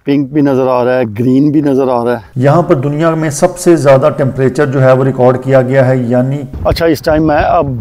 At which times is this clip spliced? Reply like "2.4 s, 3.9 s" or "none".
2.3 s, 6.4 s